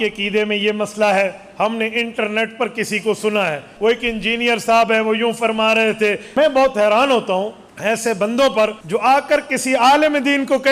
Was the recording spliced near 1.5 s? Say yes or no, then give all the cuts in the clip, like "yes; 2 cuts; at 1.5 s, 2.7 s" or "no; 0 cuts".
no; 4 cuts; at 3.7 s, 6.2 s, 7.6 s, 8.8 s